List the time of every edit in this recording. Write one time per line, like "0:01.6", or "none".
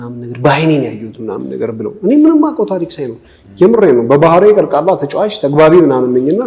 none